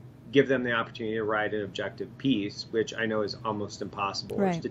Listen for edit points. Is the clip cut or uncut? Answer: uncut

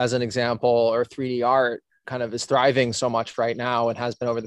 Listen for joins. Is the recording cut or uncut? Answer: uncut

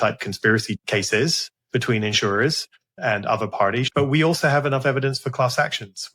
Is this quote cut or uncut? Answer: cut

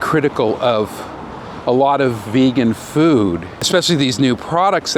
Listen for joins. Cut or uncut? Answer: cut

